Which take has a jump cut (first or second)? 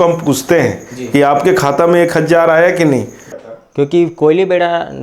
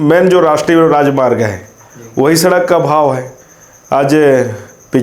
first